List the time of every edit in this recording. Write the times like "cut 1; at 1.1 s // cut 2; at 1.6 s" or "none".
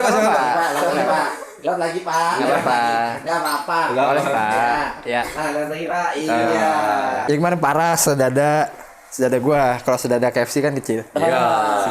cut 1; at 7.2 s